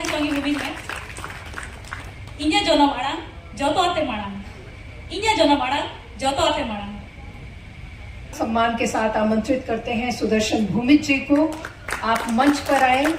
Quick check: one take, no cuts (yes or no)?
no